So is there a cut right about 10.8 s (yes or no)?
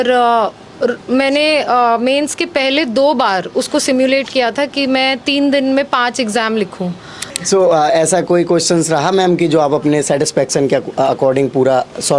no